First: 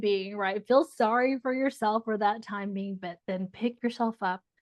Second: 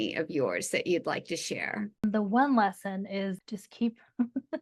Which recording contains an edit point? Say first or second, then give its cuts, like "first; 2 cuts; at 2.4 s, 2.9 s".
second; 2 cuts; at 2.0 s, 3.4 s